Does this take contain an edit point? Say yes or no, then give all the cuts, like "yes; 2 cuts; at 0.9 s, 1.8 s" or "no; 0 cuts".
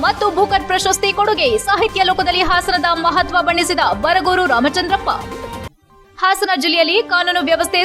no; 0 cuts